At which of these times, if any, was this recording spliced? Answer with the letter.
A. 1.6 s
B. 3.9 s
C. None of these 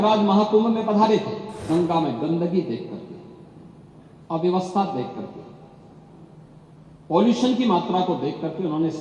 A